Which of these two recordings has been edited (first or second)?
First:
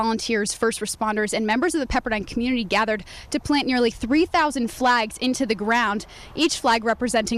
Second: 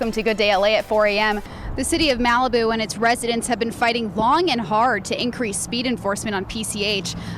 second